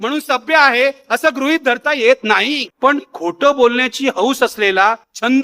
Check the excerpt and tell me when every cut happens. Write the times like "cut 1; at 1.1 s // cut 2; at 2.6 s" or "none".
cut 1; at 2.7 s